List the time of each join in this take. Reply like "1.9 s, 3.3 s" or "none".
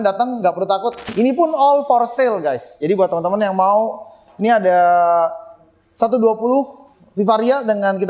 1.1 s